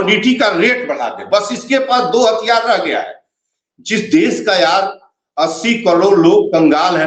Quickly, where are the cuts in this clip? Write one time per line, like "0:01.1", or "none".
none